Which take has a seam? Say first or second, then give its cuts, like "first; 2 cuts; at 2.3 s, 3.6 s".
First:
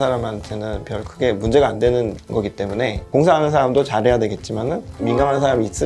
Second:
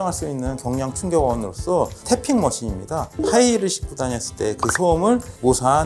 first; 2 cuts; at 3.0 s, 4.9 s